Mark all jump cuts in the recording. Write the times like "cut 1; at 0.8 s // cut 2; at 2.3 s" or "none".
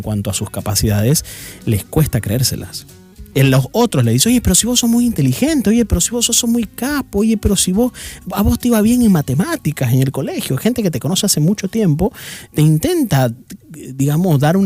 none